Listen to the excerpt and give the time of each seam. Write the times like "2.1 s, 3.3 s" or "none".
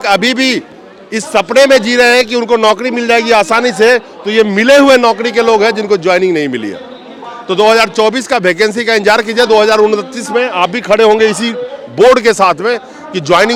none